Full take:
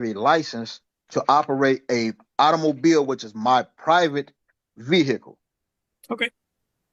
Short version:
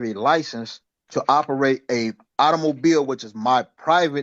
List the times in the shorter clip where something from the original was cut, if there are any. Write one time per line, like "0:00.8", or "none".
none